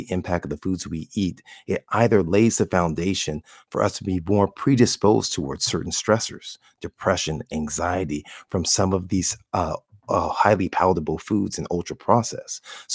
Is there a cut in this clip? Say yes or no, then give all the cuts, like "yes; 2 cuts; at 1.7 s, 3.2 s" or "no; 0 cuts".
no; 0 cuts